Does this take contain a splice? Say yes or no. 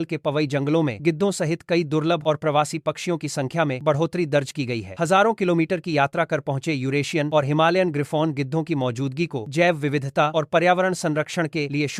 no